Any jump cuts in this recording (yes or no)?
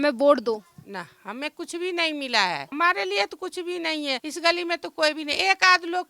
yes